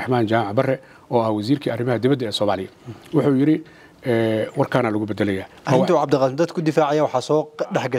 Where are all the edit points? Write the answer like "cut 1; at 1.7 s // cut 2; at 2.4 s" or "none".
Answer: cut 1; at 5.5 s